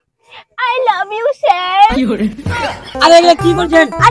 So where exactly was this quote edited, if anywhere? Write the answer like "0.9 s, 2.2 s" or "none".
2.9 s